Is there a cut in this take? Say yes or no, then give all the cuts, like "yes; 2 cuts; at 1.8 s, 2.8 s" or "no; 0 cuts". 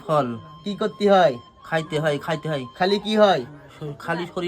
no; 0 cuts